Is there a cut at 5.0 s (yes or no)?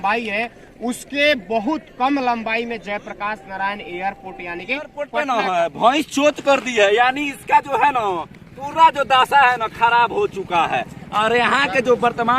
yes